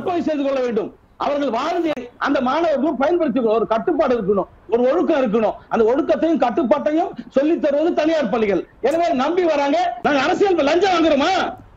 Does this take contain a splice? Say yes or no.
yes